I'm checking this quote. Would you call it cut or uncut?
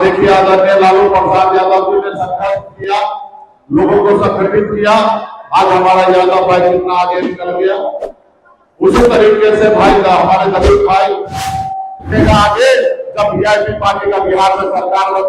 cut